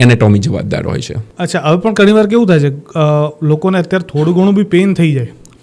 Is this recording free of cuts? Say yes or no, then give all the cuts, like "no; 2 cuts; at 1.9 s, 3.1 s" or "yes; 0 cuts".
yes; 0 cuts